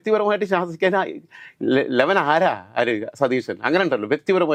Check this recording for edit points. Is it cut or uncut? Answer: uncut